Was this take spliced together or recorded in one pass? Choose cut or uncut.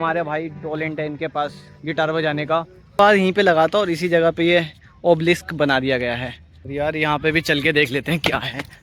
cut